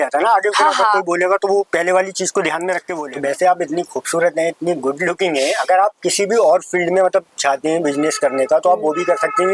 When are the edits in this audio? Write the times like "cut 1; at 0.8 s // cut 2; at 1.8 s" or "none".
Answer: cut 1; at 3.0 s